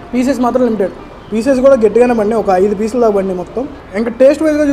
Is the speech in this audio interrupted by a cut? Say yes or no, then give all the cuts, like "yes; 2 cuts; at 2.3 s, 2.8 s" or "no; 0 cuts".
no; 0 cuts